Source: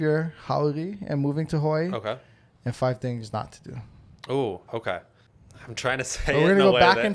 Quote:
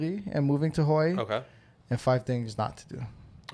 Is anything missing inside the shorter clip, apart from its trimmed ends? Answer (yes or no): no